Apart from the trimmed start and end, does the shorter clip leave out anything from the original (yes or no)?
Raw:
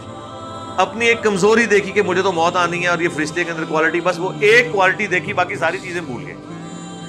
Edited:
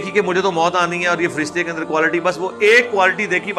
no